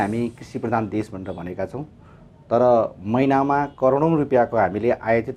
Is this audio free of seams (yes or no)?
yes